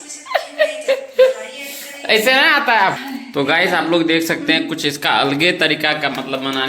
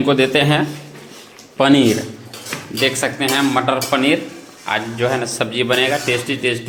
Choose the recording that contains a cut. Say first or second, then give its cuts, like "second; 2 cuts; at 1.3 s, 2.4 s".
first; 1 cut; at 3.0 s